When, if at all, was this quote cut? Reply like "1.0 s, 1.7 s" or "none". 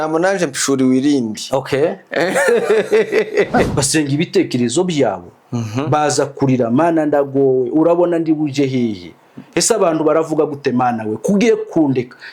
3.7 s